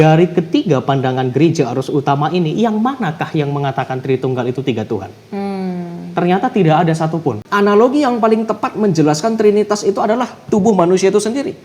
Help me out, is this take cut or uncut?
cut